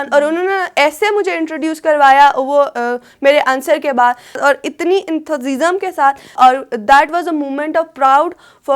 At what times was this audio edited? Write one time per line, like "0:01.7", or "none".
0:04.4
0:06.3